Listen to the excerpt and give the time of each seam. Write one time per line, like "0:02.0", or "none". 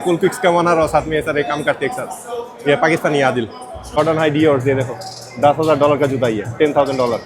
0:04.0